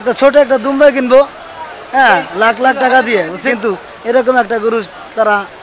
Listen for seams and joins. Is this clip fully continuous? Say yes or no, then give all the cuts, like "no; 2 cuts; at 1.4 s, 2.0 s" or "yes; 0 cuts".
no; 1 cut; at 3.4 s